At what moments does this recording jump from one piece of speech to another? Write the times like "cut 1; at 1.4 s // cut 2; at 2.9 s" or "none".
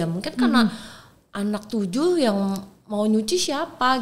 none